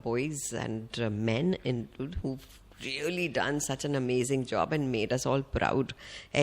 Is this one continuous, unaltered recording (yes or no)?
yes